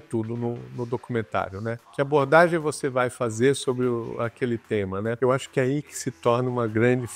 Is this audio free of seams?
no; 2 cuts; at 1.8 s, 5.2 s

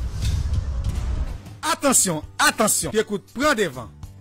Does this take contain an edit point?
yes; 1 cut; at 1.6 s

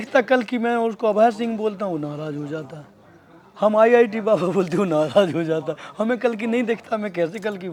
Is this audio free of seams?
yes; 0 cuts

